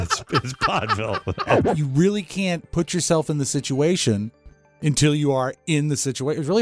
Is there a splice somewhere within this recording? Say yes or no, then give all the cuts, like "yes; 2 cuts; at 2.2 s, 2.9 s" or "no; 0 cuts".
yes; 1 cut; at 1.6 s